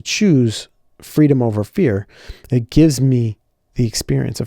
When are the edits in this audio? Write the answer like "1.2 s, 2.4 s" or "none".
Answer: none